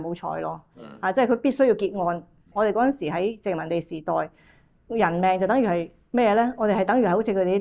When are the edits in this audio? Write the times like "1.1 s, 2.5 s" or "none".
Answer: 2.5 s